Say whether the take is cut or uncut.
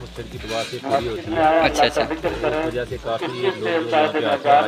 uncut